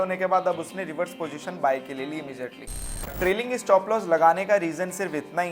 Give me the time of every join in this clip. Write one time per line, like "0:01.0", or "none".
0:03.1